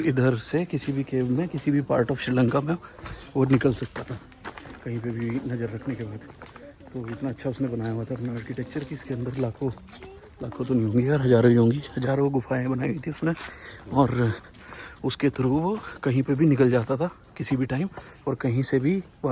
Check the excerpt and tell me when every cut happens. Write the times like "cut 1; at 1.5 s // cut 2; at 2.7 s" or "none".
none